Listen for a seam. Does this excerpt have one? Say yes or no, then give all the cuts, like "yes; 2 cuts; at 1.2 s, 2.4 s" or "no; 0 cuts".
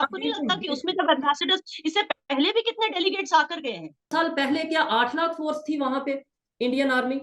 yes; 1 cut; at 4.1 s